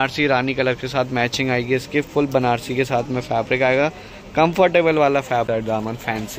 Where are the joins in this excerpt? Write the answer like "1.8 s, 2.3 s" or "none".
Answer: 5.5 s